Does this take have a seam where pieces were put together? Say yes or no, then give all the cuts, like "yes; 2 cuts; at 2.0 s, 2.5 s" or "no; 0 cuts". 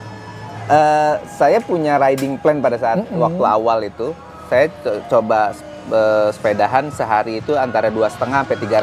no; 0 cuts